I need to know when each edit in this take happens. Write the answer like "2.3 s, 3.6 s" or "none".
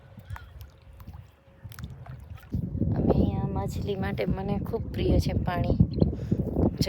2.5 s